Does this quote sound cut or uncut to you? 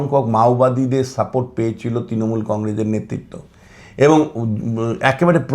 uncut